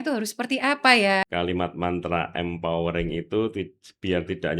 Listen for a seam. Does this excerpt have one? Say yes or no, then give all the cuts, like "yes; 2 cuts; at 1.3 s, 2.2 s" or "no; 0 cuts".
yes; 1 cut; at 1.2 s